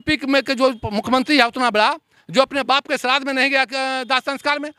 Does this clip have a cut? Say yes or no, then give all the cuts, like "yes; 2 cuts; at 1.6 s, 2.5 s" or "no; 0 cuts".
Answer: no; 0 cuts